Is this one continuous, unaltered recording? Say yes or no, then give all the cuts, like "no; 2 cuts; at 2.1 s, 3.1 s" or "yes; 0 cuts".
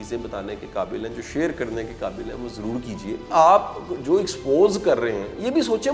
no; 1 cut; at 3.2 s